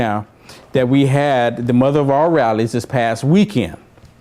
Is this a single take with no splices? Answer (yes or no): no